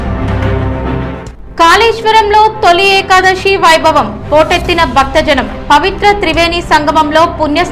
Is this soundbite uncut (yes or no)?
yes